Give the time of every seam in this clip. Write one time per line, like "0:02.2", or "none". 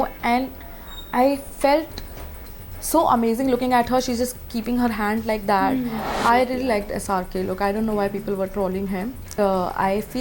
0:06.1
0:09.3